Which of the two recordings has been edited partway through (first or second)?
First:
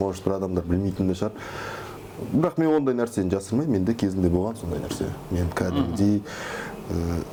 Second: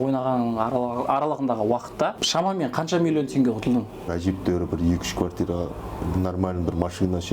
second